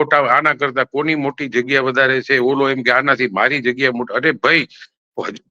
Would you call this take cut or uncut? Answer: uncut